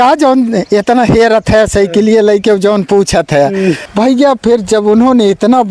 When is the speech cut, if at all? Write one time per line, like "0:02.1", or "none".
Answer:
0:03.9